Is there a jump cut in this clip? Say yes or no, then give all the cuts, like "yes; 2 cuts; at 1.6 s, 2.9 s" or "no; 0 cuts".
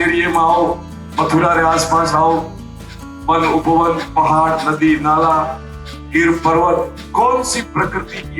no; 0 cuts